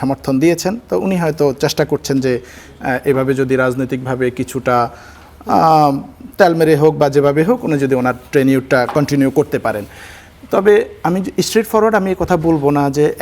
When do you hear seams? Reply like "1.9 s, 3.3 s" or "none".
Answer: none

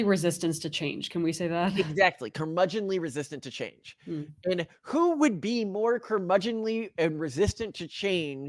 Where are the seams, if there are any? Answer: none

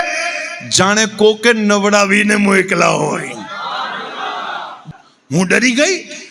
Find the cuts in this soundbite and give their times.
4.8 s

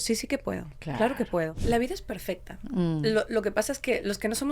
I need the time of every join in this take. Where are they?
1.6 s

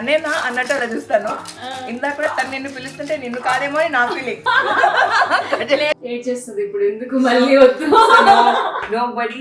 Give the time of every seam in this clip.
5.9 s

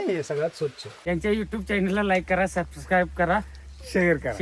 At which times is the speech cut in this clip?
0.9 s

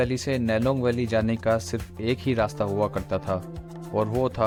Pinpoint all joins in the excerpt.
none

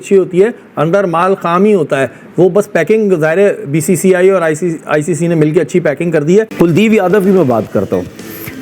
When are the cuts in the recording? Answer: 6.5 s

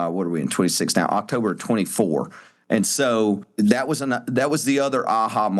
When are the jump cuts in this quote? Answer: 3.5 s

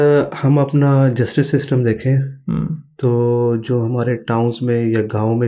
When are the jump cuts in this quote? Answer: none

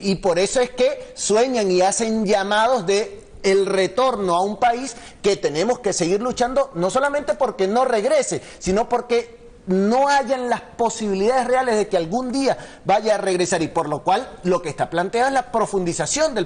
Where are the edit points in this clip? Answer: none

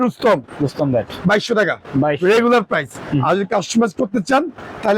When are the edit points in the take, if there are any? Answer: none

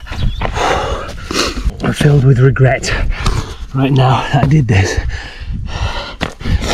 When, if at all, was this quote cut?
1.7 s

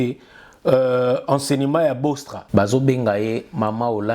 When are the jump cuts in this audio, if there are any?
2.3 s

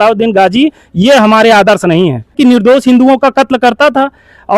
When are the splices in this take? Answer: 2.4 s

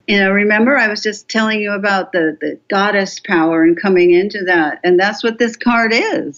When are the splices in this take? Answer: none

